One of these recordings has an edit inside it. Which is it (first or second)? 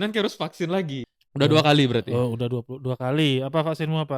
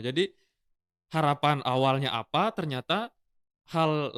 first